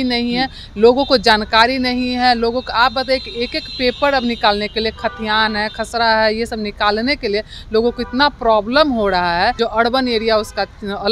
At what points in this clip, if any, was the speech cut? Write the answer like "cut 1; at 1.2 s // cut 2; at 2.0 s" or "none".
cut 1; at 9.5 s